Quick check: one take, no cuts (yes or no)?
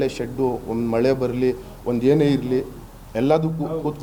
yes